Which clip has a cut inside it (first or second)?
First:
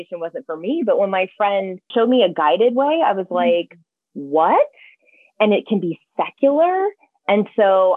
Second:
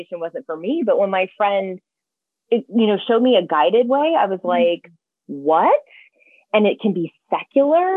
first